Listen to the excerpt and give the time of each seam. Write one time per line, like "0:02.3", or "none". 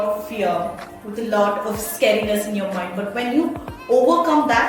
none